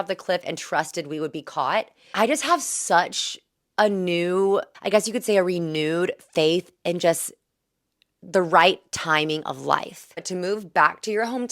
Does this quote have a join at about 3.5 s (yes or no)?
no